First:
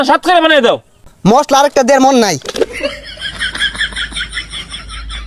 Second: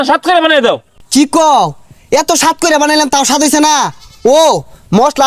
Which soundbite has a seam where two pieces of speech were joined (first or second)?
first